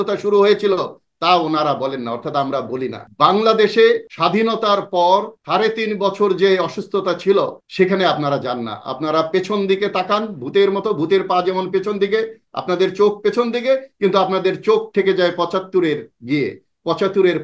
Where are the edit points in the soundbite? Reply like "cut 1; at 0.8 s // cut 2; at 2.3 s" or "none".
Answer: cut 1; at 3.0 s // cut 2; at 4.1 s // cut 3; at 5.4 s // cut 4; at 7.6 s